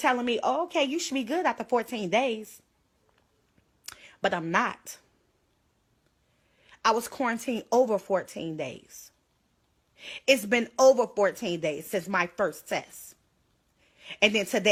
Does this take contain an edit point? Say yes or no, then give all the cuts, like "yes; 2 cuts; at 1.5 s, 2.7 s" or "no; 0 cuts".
no; 0 cuts